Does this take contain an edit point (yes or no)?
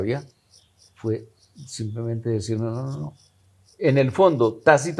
no